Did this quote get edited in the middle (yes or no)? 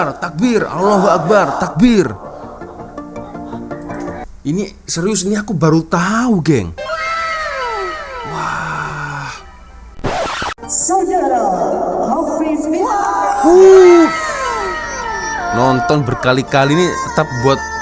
yes